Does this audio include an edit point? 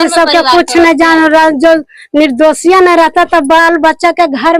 no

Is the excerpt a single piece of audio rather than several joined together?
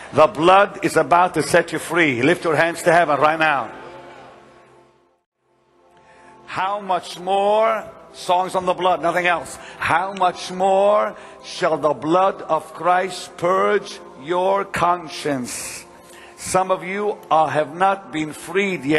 yes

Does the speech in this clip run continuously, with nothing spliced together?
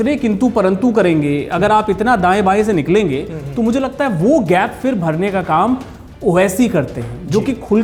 yes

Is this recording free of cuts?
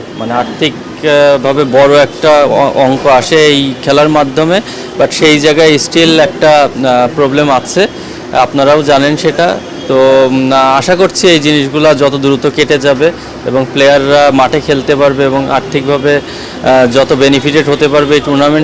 yes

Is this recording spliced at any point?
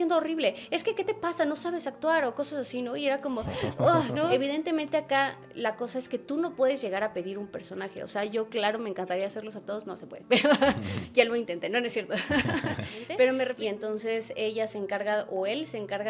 yes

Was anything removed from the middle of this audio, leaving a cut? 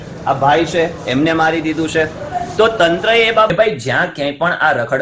yes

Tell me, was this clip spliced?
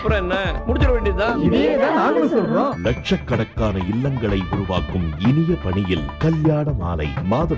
no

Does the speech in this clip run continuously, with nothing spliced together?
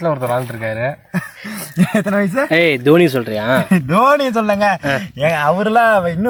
yes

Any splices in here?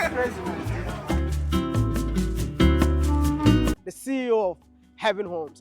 yes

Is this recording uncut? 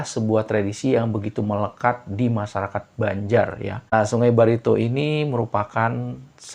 no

